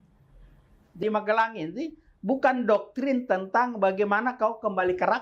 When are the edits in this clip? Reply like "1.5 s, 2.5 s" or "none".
1.0 s